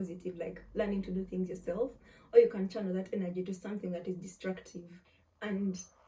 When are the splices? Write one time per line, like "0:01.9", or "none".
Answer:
0:05.1